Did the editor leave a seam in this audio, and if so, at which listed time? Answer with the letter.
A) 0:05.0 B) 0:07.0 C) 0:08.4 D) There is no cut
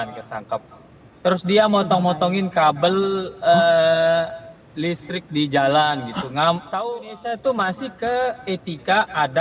B